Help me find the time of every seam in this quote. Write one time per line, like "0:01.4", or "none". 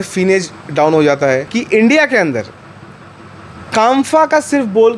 0:01.5